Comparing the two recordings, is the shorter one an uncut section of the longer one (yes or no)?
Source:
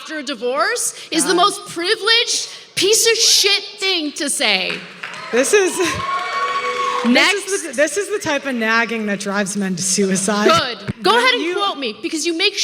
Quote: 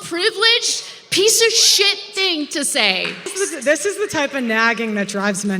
no